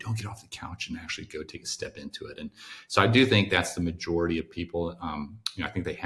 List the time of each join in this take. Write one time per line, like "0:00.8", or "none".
none